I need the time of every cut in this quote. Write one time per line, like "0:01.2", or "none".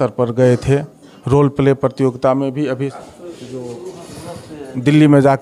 0:03.0